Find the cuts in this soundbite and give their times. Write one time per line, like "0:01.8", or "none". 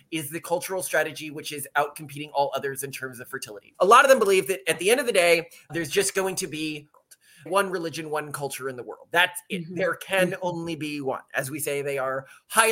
0:03.6
0:07.1